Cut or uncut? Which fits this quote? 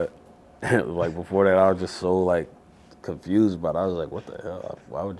uncut